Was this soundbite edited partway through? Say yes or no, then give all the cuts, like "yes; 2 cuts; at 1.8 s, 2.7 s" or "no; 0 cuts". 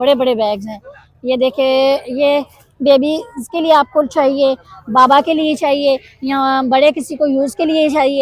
no; 0 cuts